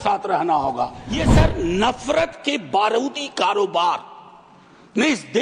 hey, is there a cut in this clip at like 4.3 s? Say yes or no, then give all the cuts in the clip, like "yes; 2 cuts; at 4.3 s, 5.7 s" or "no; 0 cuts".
no; 1 cut; at 1.1 s